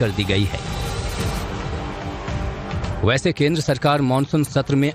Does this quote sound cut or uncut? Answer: cut